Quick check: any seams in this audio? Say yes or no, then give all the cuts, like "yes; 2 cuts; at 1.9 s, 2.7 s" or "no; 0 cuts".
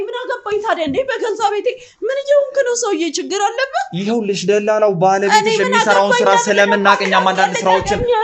no; 0 cuts